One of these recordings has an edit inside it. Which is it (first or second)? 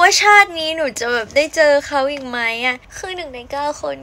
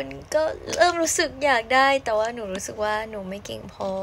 first